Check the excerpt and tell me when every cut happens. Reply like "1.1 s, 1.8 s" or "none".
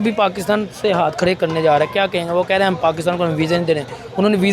none